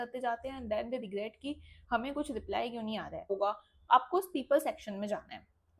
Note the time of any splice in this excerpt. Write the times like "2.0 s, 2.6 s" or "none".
3.3 s